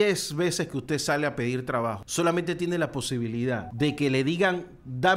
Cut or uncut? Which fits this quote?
cut